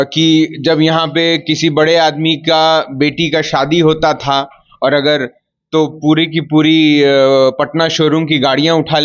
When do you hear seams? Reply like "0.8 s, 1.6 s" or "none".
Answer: none